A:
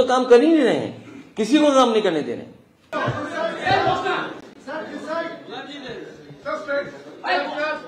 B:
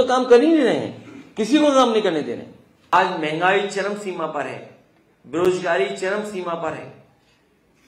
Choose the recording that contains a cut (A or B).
B